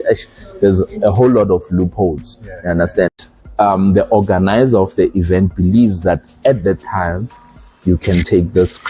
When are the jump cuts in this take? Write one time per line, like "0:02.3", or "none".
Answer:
0:03.1